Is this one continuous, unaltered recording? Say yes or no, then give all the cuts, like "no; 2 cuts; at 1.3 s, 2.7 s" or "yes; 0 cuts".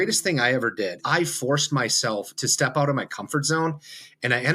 no; 1 cut; at 1.0 s